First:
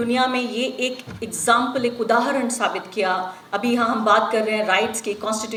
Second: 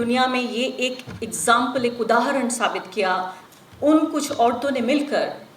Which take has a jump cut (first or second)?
second